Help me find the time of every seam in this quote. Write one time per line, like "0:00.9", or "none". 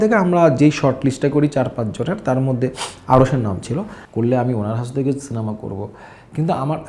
0:04.0